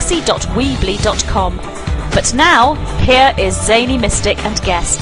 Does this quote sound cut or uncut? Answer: cut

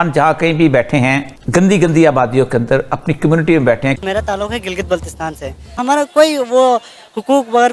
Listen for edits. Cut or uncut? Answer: cut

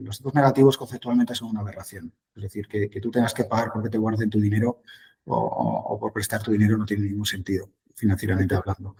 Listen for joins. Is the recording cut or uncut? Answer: uncut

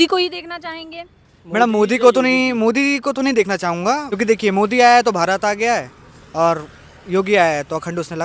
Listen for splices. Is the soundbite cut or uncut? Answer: cut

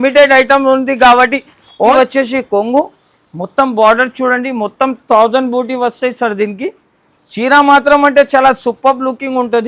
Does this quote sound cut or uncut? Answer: cut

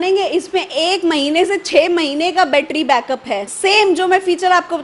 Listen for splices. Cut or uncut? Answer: uncut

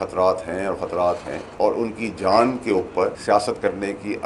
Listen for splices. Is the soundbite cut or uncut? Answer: cut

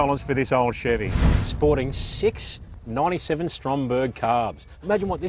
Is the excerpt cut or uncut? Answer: cut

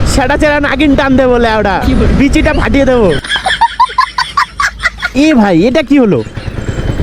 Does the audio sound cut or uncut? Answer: cut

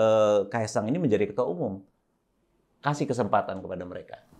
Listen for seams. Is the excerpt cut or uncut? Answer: uncut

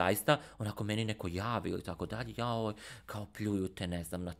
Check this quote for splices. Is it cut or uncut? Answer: uncut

